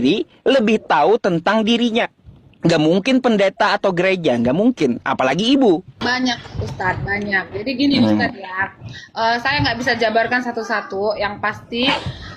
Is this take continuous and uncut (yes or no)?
no